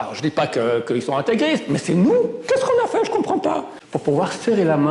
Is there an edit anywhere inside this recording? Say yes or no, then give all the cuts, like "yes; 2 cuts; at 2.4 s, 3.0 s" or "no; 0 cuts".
yes; 1 cut; at 3.8 s